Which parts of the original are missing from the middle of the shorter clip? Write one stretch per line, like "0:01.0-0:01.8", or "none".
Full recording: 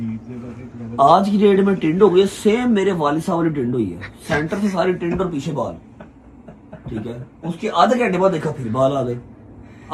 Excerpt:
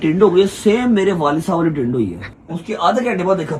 0:04.1-0:07.2